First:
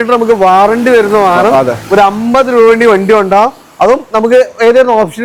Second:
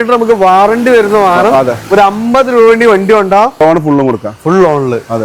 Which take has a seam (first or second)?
second